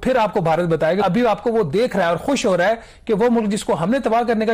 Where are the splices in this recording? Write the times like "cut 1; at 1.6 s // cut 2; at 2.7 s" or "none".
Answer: cut 1; at 1.0 s